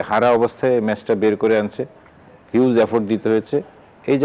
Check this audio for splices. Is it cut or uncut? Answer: uncut